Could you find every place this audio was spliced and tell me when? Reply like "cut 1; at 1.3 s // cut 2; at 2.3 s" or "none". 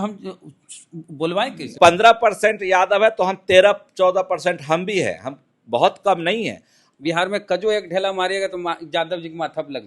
cut 1; at 1.7 s // cut 2; at 6.9 s